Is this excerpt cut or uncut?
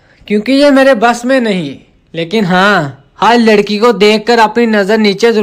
uncut